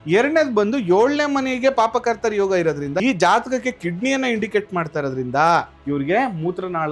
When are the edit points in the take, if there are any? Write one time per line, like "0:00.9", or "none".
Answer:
0:03.0
0:05.8